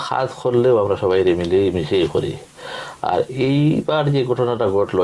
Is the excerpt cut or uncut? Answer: uncut